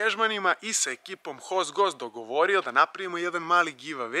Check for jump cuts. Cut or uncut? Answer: uncut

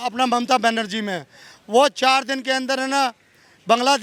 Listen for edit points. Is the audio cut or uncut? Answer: uncut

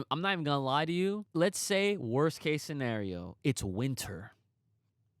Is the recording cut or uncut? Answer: cut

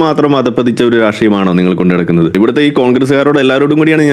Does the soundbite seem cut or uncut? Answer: cut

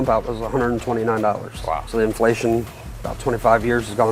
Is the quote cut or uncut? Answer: cut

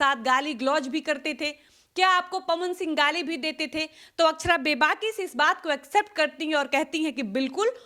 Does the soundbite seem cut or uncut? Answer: uncut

